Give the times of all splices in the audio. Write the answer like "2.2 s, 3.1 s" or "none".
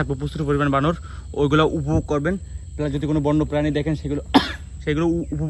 none